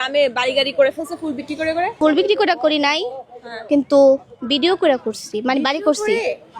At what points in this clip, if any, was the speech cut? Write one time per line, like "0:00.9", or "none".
0:02.0